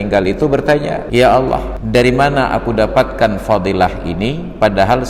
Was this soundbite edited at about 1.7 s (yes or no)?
yes